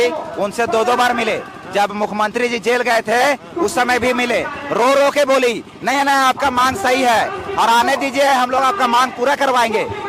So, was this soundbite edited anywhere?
no; 0 cuts

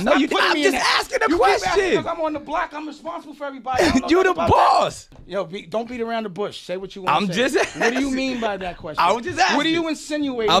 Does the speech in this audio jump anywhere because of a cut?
yes; 1 cut; at 5.2 s

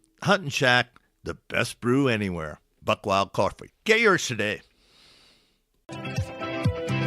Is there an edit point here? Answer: yes; 1 cut; at 5.8 s

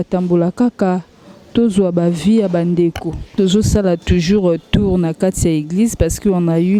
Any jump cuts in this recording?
no; 0 cuts

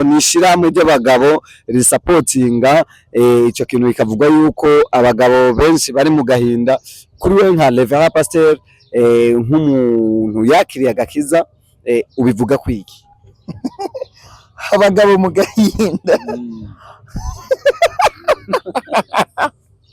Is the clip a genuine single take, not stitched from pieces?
yes; 0 cuts

